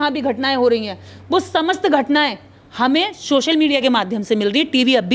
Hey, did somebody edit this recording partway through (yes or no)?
no